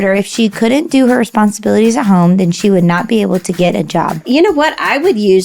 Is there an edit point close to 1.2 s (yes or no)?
no